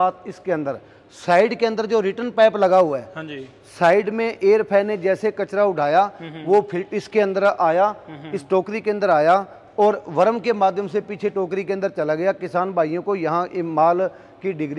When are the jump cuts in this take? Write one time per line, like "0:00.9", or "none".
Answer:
none

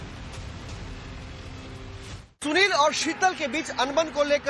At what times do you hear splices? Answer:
0:01.1

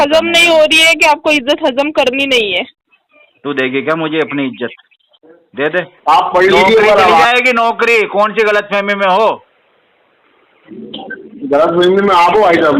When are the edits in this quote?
0:05.9

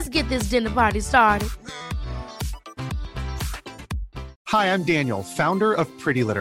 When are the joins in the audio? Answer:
0:04.4

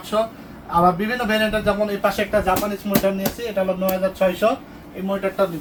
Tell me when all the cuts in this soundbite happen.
none

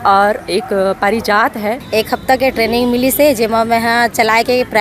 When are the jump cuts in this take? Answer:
0:01.8

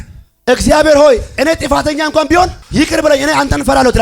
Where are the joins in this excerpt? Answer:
0:02.6

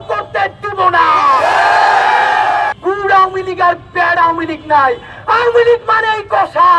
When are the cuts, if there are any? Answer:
0:02.7

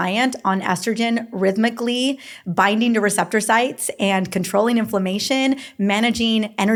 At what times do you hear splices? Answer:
none

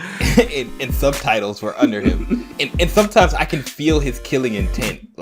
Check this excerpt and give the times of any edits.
0:02.4

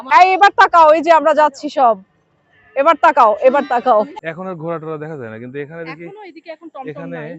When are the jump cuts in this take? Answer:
0:04.2

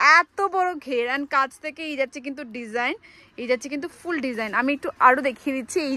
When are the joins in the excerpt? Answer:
none

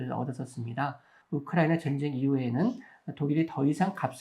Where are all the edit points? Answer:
0:01.1

